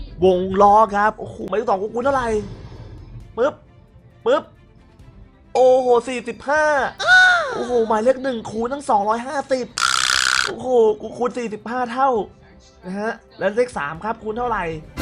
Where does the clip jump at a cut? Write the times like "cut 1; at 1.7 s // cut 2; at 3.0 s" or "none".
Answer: cut 1; at 1.3 s